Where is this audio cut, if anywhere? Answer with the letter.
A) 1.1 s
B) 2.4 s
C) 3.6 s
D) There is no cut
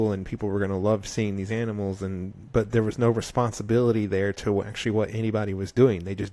D